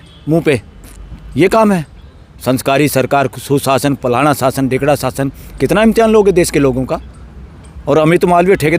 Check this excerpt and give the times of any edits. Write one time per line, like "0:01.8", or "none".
none